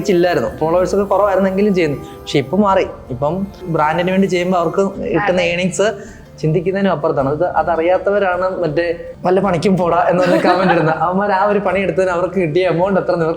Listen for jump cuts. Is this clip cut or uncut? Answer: cut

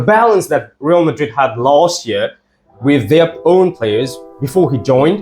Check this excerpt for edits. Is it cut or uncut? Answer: uncut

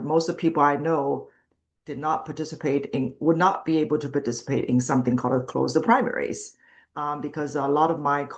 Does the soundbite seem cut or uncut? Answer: uncut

